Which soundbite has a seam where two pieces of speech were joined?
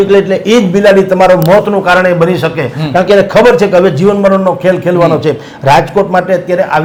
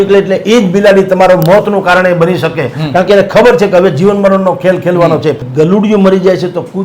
second; 1 cut; at 5.5 s

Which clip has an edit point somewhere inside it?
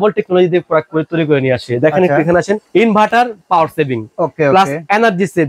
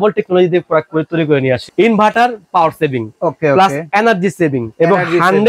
second; 2 cuts; at 1.7 s, 4.6 s

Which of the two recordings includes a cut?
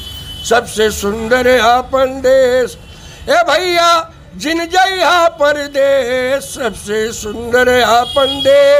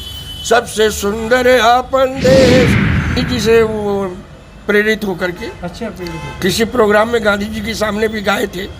second; 1 cut; at 3.2 s

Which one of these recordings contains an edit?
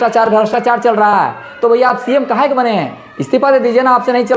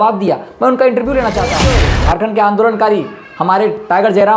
second; 1 cut; at 1.7 s

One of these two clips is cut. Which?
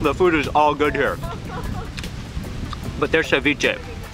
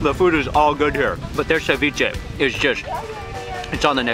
second; 2 cuts; at 1.2 s, 2.2 s

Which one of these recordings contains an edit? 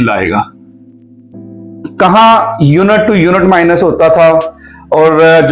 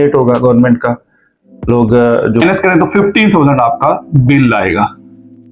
second; 1 cut; at 2.4 s

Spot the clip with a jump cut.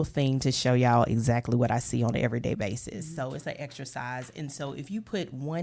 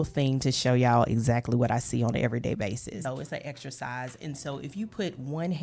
second; 1 cut; at 3.0 s

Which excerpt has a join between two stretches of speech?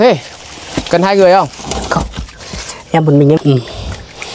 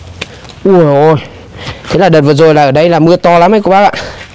first; 1 cut; at 3.4 s

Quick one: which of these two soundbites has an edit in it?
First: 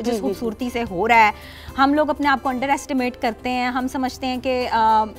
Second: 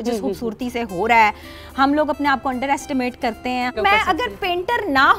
second; 1 cut; at 3.7 s

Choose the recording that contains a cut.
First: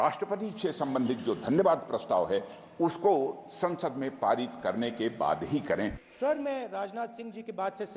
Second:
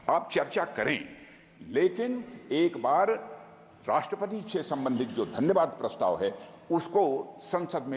first; 1 cut; at 6.0 s

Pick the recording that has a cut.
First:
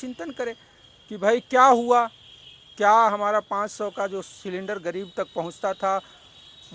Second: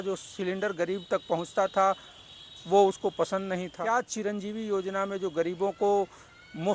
second; 1 cut; at 3.7 s

